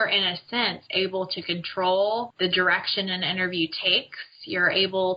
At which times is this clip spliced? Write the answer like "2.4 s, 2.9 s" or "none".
2.3 s